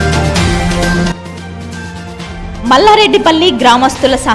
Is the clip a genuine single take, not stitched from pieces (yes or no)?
no